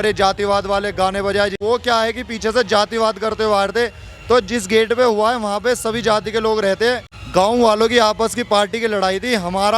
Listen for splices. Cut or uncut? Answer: cut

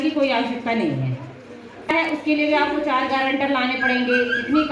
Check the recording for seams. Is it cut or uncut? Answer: cut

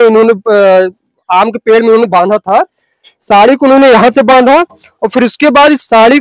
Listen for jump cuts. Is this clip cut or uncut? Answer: uncut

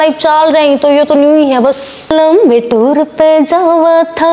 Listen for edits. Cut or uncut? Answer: cut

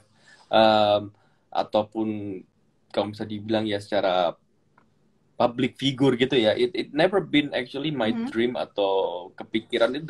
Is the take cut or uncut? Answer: uncut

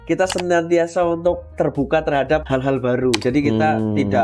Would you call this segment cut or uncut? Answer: cut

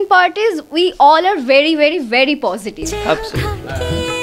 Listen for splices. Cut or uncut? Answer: cut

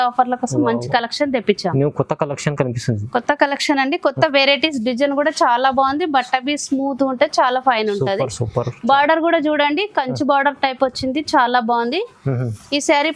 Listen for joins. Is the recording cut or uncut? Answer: uncut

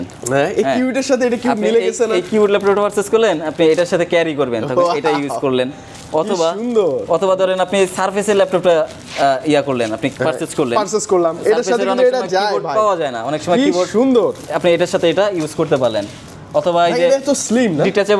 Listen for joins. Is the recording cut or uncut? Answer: uncut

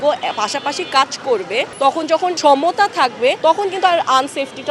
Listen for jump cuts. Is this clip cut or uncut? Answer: cut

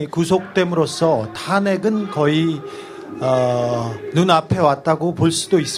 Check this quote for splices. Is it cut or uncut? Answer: uncut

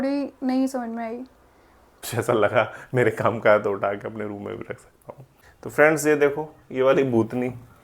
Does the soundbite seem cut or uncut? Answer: cut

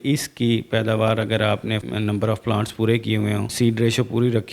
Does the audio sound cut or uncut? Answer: cut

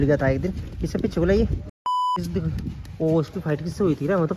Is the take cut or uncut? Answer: cut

